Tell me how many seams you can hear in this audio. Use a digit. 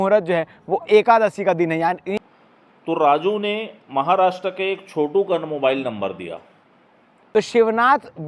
2